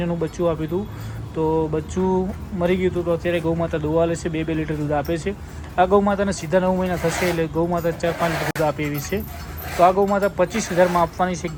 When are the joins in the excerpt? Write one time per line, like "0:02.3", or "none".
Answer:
none